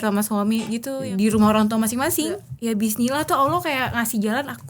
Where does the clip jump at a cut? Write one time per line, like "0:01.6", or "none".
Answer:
0:01.0
0:02.5